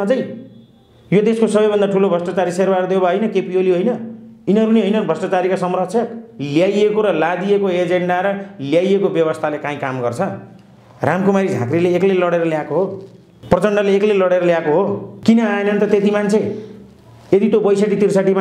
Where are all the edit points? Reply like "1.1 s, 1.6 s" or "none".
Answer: 6.3 s, 15.1 s